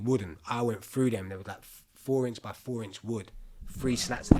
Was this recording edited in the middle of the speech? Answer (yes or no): no